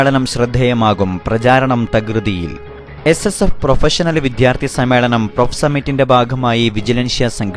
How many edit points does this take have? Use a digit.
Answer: 0